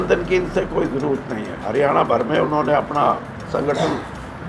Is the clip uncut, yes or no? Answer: no